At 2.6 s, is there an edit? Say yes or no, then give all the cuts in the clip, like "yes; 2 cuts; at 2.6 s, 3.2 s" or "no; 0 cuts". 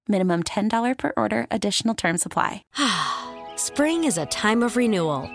yes; 1 cut; at 2.6 s